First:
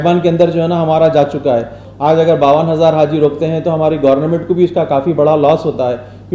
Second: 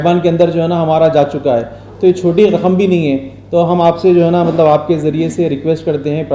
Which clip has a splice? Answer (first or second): first